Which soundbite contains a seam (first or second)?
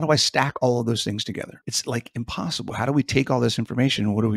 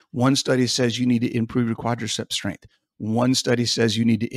first